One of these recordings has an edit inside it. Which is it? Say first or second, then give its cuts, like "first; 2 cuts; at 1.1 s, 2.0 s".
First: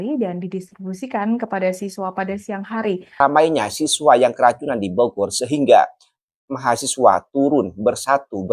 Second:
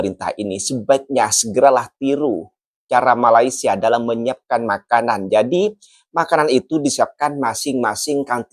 first; 1 cut; at 3.1 s